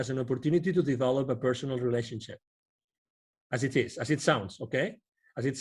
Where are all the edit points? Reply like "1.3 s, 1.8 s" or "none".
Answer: none